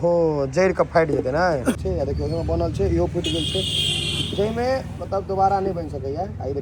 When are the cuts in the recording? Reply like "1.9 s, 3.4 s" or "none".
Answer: 1.8 s